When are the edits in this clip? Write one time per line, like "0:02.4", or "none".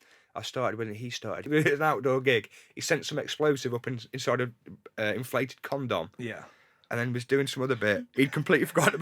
0:01.4